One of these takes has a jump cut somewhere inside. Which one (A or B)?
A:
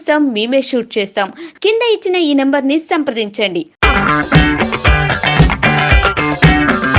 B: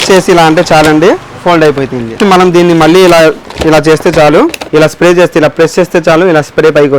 B